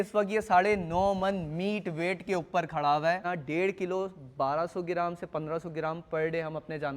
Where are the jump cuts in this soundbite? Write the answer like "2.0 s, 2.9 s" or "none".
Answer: 3.2 s